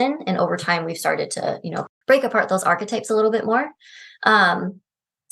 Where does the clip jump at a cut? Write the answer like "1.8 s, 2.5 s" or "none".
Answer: 1.8 s